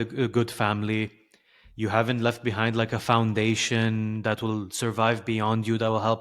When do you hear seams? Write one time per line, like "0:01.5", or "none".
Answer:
none